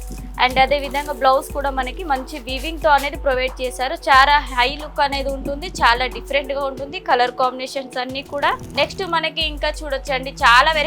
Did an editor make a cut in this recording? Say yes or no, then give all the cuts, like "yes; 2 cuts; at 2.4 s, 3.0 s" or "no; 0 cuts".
yes; 1 cut; at 8.7 s